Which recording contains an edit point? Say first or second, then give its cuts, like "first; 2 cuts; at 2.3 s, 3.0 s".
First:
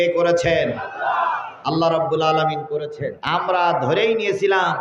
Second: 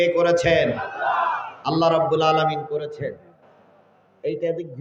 first; 1 cut; at 3.1 s